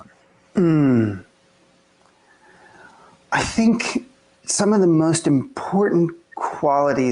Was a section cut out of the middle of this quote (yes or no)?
yes